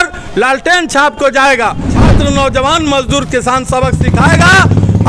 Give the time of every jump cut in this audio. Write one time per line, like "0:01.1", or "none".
0:02.0